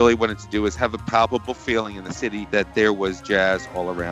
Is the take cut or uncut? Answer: uncut